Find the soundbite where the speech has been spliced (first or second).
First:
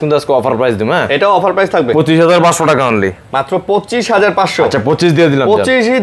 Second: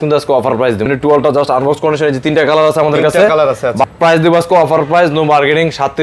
second